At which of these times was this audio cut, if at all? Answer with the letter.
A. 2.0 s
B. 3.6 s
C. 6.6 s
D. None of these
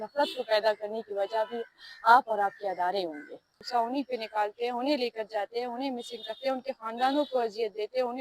B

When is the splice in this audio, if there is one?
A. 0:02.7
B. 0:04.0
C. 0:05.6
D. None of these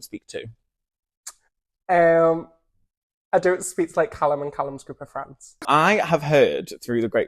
C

